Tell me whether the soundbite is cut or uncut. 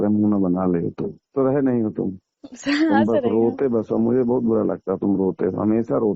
cut